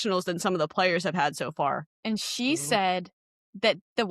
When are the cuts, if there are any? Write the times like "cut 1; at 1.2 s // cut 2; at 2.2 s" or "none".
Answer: cut 1; at 1.9 s